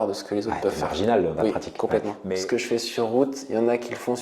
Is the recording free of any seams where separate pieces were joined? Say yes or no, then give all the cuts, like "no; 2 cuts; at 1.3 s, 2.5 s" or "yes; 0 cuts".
no; 1 cut; at 2.2 s